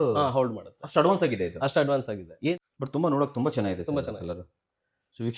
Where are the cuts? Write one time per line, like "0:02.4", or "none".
0:02.5